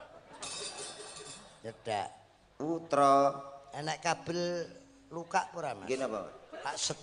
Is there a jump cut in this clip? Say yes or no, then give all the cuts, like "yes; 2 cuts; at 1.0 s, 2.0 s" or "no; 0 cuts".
no; 0 cuts